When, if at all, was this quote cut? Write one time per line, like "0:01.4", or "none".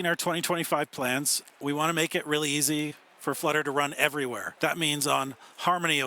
0:01.6
0:04.5